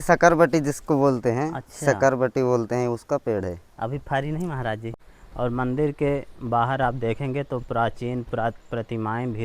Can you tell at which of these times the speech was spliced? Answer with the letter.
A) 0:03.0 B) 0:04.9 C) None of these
B